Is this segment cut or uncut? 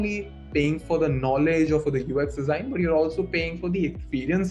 uncut